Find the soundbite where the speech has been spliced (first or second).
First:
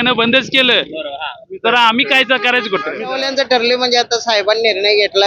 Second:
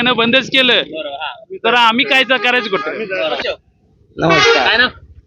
first